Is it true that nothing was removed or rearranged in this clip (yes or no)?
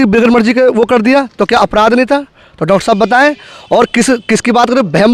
yes